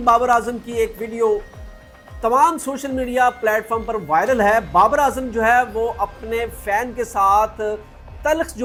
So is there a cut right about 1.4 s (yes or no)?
no